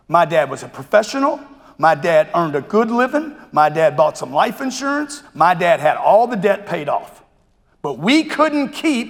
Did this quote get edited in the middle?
no; 0 cuts

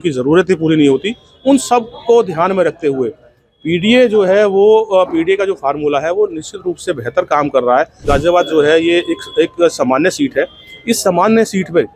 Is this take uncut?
no; 1 cut; at 8.0 s

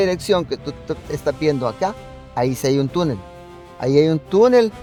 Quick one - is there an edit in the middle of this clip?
no; 0 cuts

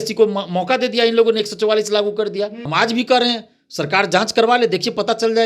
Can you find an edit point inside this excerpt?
yes; 1 cut; at 2.6 s

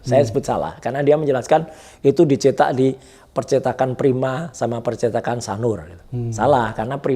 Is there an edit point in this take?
no; 0 cuts

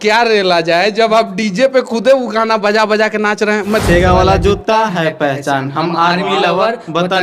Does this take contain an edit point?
yes; 1 cut; at 3.8 s

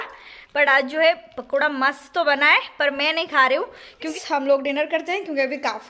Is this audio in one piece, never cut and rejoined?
no; 1 cut; at 4.2 s

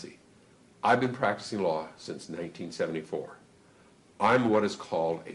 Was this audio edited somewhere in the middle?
no; 0 cuts

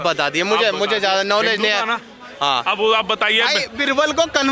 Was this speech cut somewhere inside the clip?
no; 0 cuts

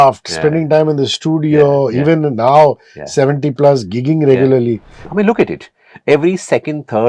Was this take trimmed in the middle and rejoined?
yes; 1 cut; at 5.0 s

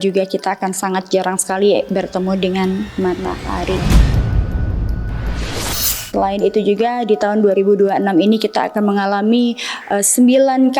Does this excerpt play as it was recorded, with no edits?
no; 2 cuts; at 3.8 s, 6.1 s

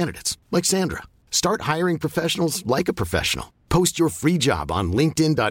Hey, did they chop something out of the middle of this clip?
no; 0 cuts

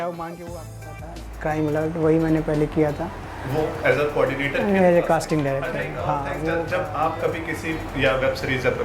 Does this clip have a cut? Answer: yes; 2 cuts; at 1.0 s, 6.7 s

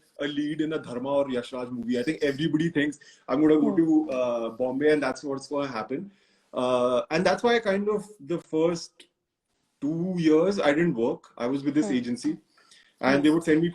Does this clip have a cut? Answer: no; 0 cuts

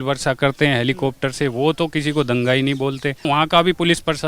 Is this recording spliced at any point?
yes; 1 cut; at 3.3 s

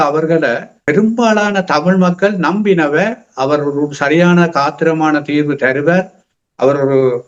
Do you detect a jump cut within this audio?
no; 0 cuts

